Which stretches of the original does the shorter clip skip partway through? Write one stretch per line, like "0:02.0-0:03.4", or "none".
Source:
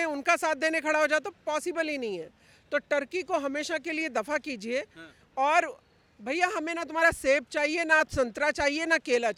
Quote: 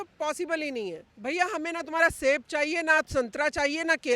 0:02.3-0:06.1